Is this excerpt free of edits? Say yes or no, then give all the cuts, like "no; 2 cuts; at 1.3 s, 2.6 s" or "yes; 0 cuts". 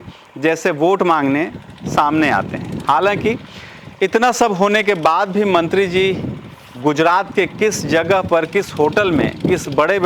yes; 0 cuts